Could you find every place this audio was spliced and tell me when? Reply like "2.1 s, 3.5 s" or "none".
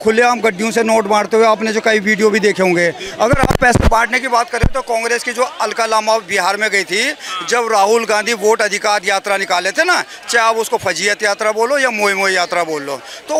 none